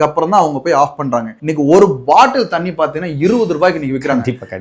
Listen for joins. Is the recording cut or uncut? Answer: uncut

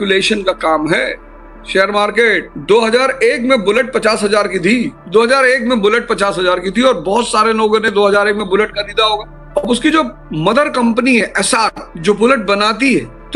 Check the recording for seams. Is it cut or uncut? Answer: uncut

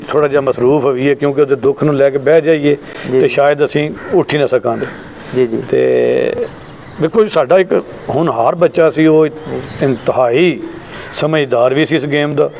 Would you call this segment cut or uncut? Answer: uncut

